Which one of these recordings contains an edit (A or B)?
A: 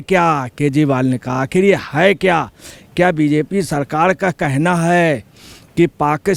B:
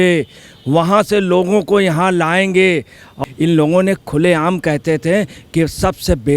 B